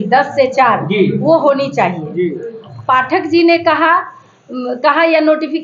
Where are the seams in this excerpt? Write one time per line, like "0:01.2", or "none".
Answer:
0:02.7